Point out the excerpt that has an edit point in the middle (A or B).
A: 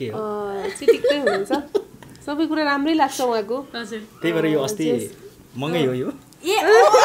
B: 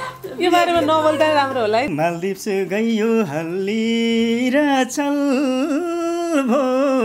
B